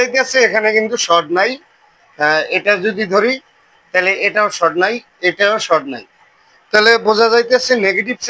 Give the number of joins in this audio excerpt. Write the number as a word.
zero